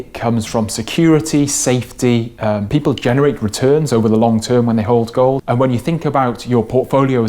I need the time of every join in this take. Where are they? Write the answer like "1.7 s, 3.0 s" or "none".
2.6 s, 5.4 s